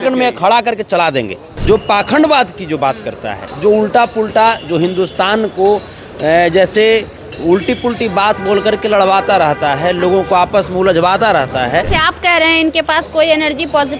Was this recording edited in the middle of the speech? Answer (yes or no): yes